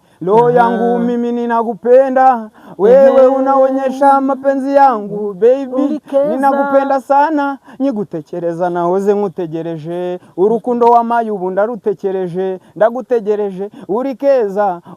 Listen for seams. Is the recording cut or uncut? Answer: uncut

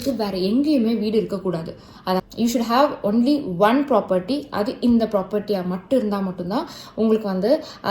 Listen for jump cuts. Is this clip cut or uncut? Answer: cut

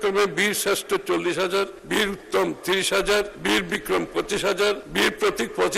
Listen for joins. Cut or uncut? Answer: cut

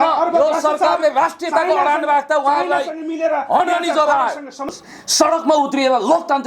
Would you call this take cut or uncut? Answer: cut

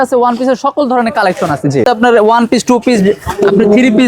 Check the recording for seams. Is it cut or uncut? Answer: cut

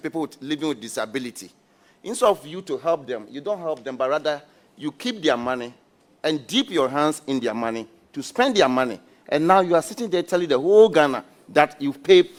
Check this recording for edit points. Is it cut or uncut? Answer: uncut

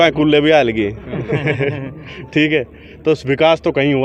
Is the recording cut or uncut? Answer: uncut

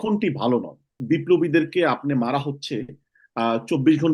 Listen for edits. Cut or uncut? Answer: cut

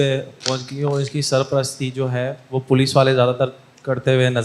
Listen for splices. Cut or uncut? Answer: uncut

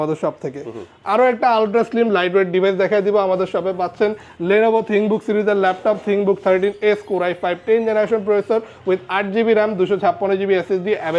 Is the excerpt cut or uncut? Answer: uncut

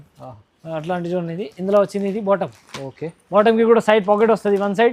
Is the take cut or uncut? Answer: uncut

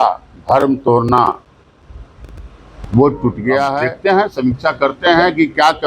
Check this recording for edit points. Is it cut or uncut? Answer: cut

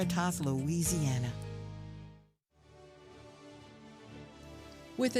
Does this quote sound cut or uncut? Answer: uncut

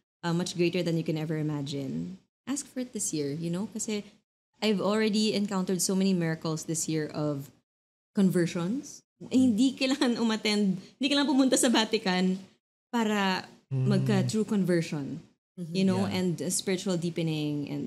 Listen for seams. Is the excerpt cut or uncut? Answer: uncut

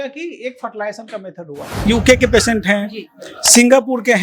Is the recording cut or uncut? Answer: cut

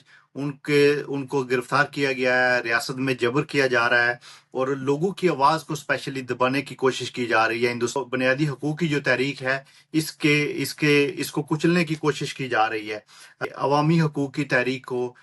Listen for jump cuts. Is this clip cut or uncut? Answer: cut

